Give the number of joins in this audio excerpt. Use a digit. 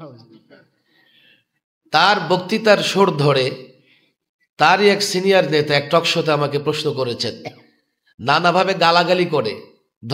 0